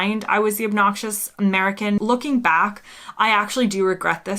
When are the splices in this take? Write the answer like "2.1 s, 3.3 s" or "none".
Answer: 2.0 s